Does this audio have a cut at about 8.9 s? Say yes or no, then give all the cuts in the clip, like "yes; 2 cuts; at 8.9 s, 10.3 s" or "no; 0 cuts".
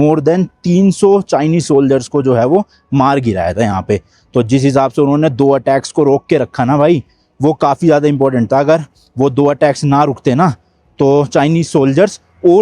no; 0 cuts